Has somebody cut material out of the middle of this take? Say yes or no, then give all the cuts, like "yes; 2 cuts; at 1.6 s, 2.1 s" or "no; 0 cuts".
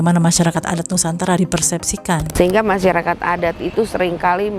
yes; 1 cut; at 2.3 s